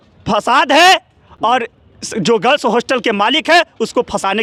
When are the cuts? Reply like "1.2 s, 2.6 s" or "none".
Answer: none

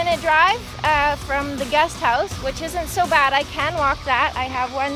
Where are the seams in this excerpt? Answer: none

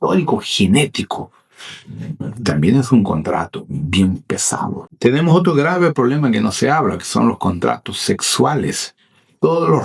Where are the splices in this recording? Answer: 4.9 s

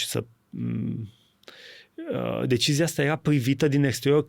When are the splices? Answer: none

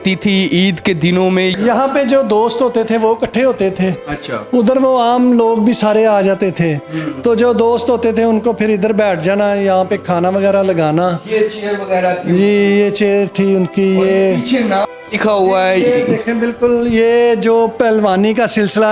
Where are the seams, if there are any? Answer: 1.5 s

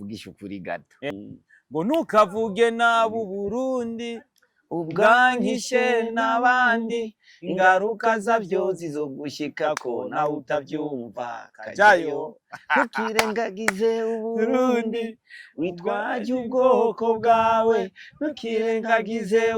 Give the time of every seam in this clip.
1.1 s

